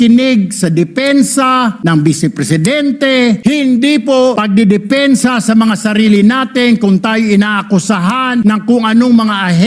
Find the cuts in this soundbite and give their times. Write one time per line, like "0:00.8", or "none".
0:01.8
0:03.4
0:04.4
0:08.4